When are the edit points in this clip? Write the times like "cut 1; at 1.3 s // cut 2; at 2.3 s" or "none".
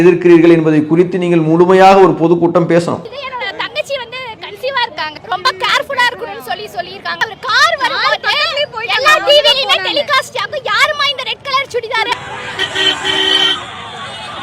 cut 1; at 3.2 s // cut 2; at 7.2 s // cut 3; at 12.1 s